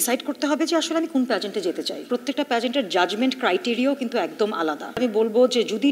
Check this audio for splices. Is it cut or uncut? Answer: cut